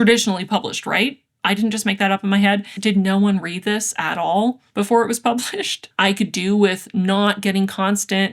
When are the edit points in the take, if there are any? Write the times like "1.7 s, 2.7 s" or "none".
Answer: 2.7 s, 5.9 s